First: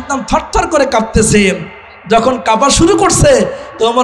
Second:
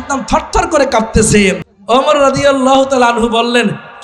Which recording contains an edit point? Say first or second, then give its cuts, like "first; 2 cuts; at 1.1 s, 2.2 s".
second; 1 cut; at 1.7 s